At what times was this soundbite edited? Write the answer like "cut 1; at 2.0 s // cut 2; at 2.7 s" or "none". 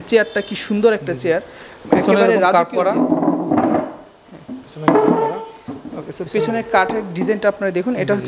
none